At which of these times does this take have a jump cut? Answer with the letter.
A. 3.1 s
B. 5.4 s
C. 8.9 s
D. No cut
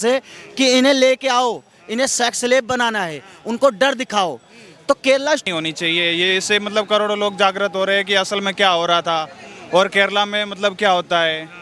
B